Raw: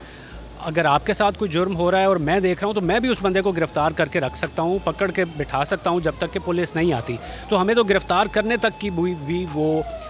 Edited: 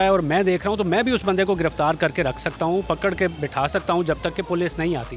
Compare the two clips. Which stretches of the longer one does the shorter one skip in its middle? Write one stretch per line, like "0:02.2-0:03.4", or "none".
none